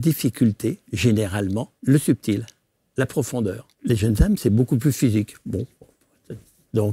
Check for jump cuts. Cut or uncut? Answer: cut